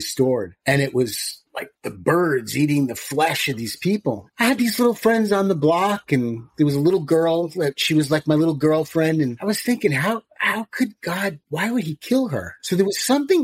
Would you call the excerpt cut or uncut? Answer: uncut